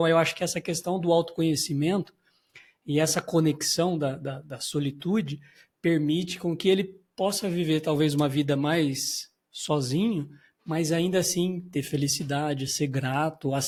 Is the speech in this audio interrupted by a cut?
no; 0 cuts

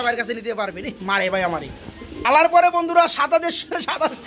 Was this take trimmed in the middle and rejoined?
no; 0 cuts

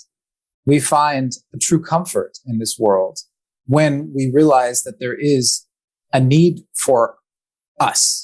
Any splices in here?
no; 0 cuts

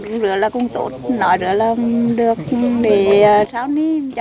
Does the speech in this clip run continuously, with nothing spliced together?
yes; 0 cuts

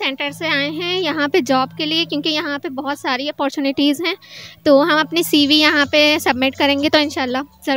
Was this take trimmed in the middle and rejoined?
no; 0 cuts

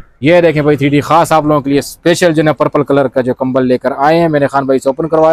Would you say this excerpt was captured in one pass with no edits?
yes; 0 cuts

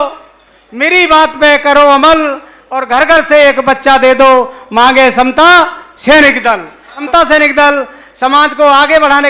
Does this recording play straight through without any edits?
no; 1 cut; at 7.0 s

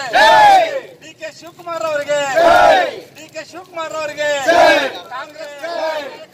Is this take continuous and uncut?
no; 1 cut; at 5.4 s

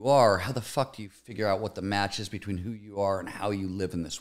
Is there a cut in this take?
no; 0 cuts

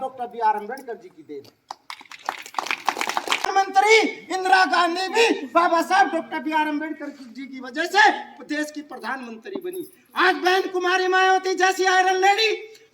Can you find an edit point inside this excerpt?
yes; 1 cut; at 3.5 s

